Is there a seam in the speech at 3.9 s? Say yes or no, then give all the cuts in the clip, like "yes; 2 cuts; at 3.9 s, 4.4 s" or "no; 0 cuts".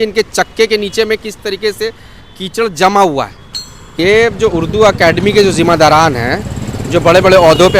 yes; 1 cut; at 3.9 s